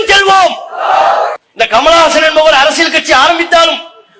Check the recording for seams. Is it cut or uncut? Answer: cut